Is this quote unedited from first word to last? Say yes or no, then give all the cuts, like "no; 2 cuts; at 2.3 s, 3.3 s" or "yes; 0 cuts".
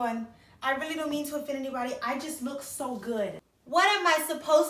no; 1 cut; at 3.5 s